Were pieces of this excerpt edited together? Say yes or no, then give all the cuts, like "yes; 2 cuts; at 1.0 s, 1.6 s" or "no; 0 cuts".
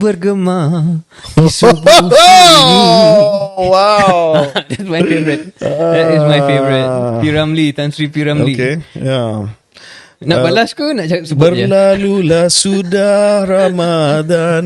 no; 0 cuts